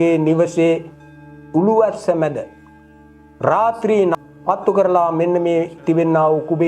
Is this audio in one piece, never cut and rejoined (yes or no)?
no